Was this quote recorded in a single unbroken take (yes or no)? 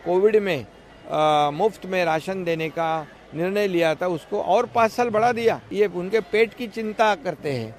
no